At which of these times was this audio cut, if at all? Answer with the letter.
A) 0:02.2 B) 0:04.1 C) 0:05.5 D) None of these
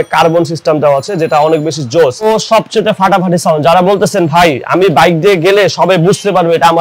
A